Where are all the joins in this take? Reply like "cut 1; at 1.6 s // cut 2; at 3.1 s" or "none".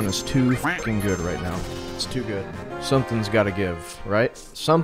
none